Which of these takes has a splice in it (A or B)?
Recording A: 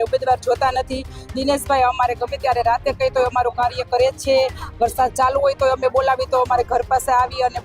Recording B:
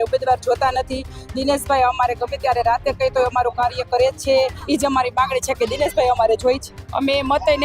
B